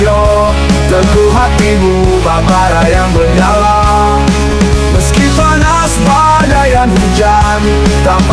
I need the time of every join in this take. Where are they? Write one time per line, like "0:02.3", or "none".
none